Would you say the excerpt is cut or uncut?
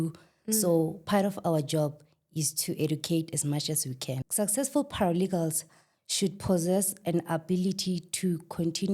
cut